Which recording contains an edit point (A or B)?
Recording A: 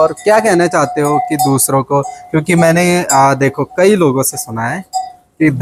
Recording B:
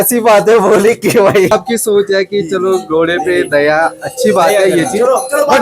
B